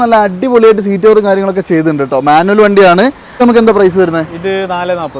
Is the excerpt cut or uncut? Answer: cut